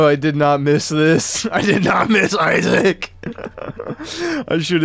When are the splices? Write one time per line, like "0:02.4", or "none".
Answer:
none